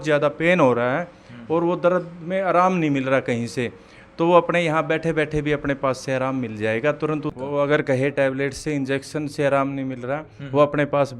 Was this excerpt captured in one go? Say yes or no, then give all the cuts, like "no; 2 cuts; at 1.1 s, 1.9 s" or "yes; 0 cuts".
no; 1 cut; at 7.3 s